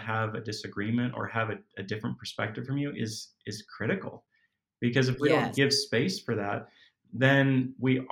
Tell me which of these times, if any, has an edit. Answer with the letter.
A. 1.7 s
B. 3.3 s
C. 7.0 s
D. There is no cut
D